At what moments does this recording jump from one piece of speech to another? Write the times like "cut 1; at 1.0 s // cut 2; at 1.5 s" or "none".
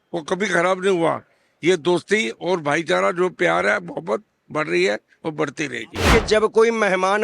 cut 1; at 6.1 s